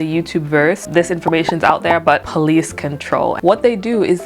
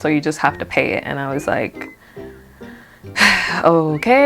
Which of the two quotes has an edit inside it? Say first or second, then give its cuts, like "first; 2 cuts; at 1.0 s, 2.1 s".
first; 3 cuts; at 0.8 s, 2.3 s, 3.4 s